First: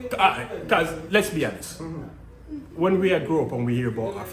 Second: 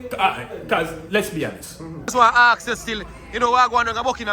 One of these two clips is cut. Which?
second; 1 cut; at 2.1 s

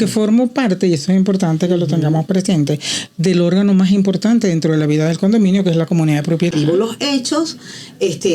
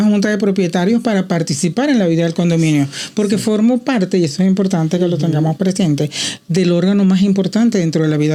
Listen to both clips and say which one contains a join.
first; 1 cut; at 6.5 s

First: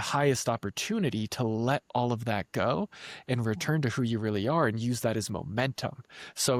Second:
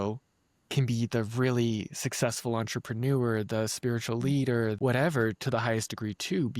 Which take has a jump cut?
second; 1 cut; at 4.8 s

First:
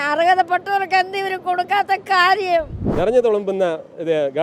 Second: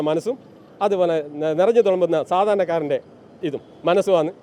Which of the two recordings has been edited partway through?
first; 1 cut; at 2.8 s

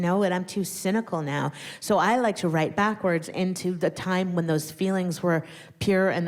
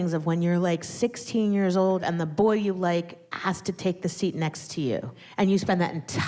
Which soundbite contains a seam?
second; 3 cuts; at 2.0 s, 3.2 s, 5.2 s

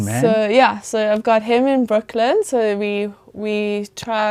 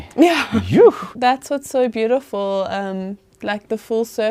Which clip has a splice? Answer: second; 1 cut; at 1.1 s

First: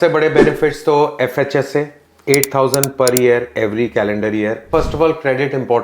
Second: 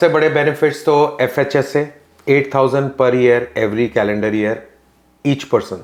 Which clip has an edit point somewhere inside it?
first; 1 cut; at 4.7 s

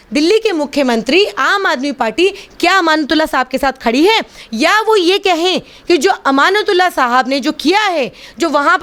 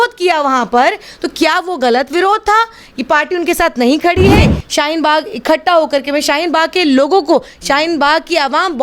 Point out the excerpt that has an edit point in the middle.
second; 1 cut; at 4.5 s

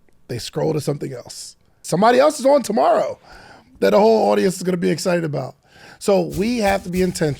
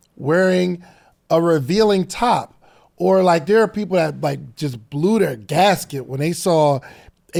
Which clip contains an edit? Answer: first; 1 cut; at 1.8 s

